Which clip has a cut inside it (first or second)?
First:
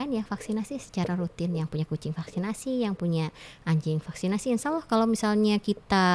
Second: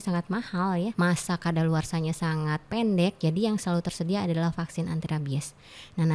second